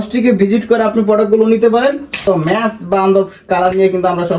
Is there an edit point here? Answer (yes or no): yes